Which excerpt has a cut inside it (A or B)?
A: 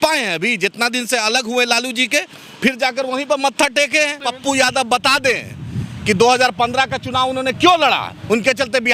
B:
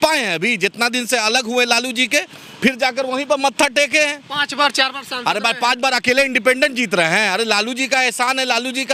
A